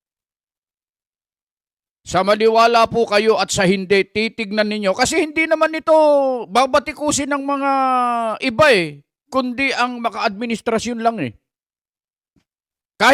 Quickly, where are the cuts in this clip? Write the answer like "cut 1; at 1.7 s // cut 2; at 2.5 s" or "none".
none